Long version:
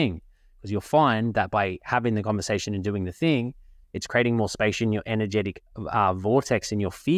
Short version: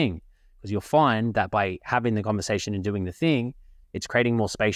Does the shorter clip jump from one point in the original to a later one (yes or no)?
no